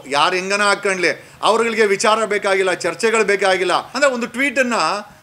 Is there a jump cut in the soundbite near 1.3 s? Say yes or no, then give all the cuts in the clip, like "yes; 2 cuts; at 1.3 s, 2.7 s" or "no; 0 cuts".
no; 1 cut; at 3.9 s